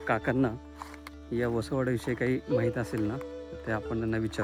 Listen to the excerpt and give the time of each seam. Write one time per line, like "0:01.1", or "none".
none